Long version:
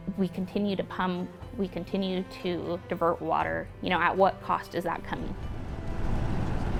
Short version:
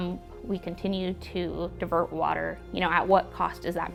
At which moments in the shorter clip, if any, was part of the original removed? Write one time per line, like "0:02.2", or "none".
none